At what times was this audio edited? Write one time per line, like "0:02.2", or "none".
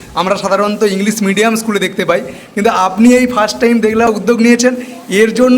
0:04.1